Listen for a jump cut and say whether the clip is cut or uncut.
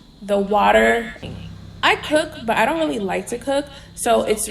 cut